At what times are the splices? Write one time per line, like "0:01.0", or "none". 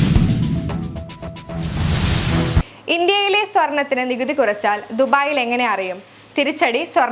0:01.5